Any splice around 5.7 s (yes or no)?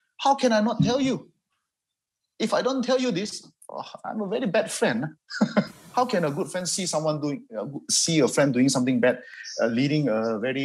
yes